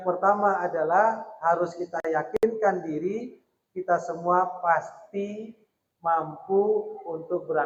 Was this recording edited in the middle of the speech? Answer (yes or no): no